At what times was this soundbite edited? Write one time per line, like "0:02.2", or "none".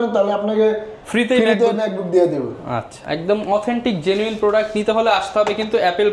none